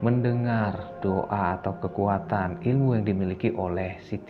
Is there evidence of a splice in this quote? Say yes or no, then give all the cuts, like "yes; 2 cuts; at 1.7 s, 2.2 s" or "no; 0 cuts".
no; 0 cuts